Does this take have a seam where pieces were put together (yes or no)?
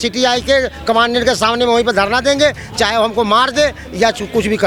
no